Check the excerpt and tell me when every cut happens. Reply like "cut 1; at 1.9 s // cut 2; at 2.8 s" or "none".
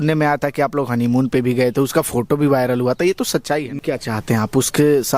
cut 1; at 3.8 s